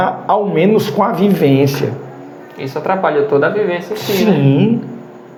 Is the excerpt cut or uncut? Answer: uncut